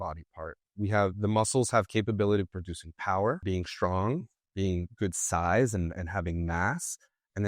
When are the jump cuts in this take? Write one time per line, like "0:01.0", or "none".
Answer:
0:03.4